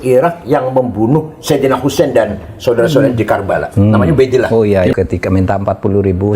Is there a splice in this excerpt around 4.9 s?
yes; 1 cut; at 4.9 s

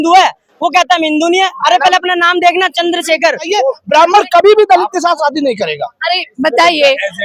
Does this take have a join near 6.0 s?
no; 1 cut; at 3.5 s

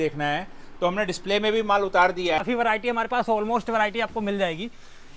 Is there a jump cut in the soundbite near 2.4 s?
yes; 1 cut; at 2.4 s

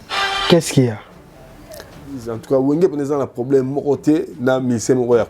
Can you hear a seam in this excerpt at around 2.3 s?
yes; 1 cut; at 2.3 s

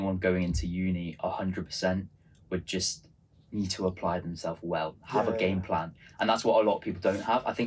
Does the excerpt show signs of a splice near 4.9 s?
no; 0 cuts

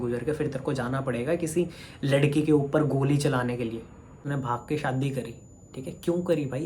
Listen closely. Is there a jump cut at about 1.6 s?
no; 1 cut; at 4.2 s

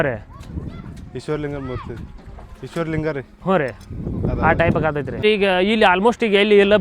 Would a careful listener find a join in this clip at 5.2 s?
yes; 1 cut; at 5.2 s

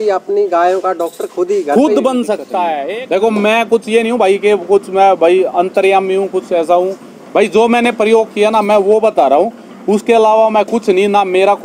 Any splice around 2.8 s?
yes; 1 cut; at 2.8 s

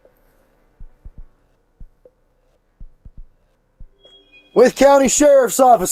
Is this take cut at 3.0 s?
no; 1 cut; at 4.5 s

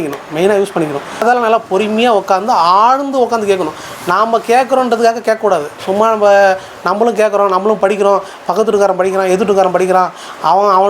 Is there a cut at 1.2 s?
yes; 1 cut; at 1.2 s

